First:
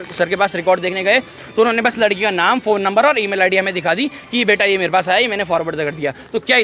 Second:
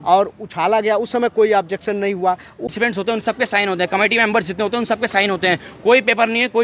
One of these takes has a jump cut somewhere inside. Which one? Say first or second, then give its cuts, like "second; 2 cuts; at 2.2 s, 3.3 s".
second; 1 cut; at 2.7 s